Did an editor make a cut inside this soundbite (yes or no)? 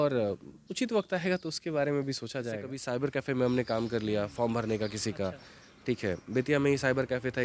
yes